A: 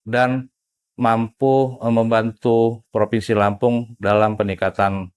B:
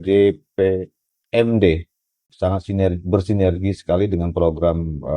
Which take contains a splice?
B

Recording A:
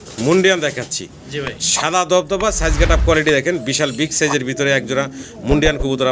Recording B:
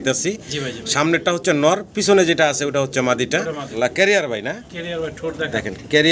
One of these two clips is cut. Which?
B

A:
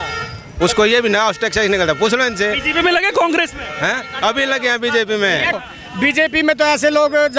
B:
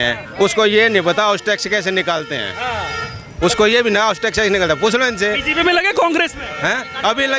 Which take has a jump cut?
A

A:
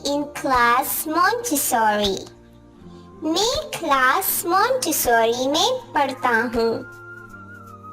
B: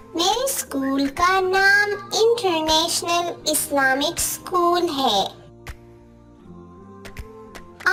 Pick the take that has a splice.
A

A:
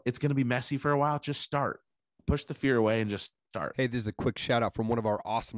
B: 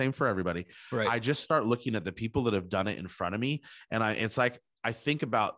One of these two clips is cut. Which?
A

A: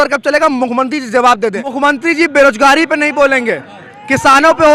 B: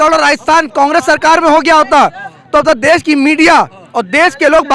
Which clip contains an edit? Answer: A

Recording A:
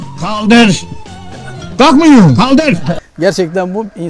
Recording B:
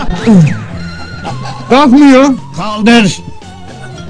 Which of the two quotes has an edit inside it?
A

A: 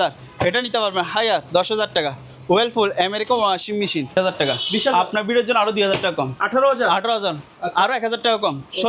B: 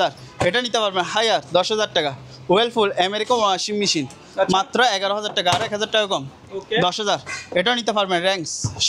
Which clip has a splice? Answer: A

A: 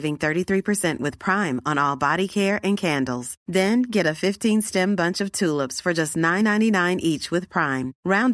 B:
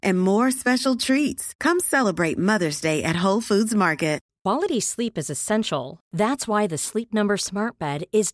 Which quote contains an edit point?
B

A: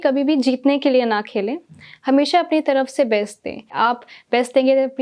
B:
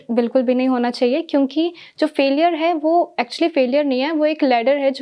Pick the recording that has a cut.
A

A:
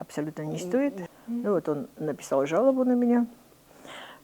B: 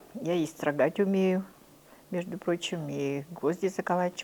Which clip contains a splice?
A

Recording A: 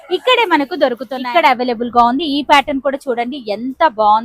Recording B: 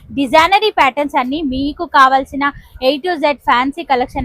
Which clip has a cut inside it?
A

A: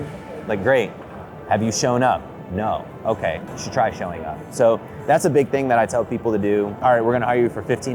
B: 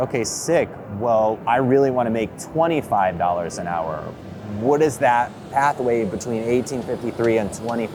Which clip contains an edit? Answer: A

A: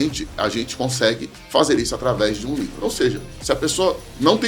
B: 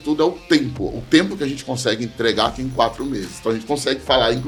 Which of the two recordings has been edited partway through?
A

